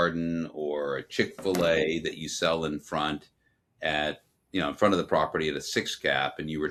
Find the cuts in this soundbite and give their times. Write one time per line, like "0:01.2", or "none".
none